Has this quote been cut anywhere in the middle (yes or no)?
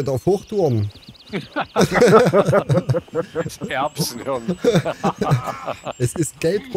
no